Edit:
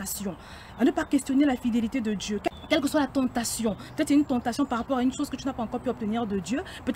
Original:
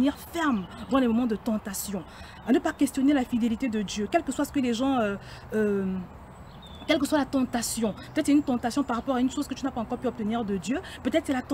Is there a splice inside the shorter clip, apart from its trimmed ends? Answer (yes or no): yes